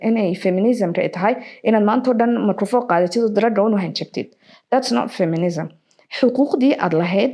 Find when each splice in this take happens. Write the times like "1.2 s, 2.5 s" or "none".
none